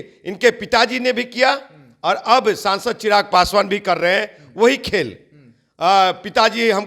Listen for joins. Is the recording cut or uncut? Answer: uncut